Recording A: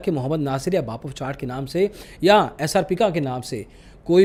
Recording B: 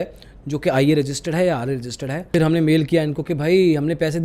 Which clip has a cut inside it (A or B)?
B